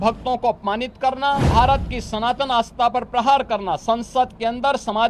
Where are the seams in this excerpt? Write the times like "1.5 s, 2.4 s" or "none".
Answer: 1.5 s